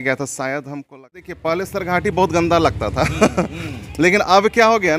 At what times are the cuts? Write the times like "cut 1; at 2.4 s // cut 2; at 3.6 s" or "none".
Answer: cut 1; at 1.4 s